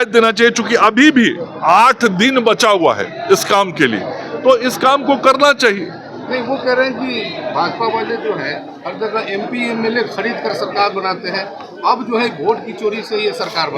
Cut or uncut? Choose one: uncut